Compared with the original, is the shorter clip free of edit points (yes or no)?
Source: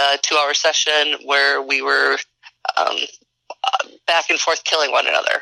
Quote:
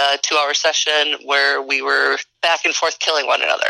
no